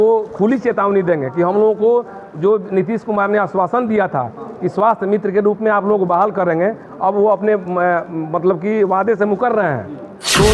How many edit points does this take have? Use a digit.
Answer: 0